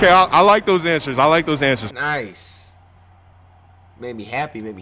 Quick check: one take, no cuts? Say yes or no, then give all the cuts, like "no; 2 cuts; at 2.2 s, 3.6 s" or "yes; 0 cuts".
yes; 0 cuts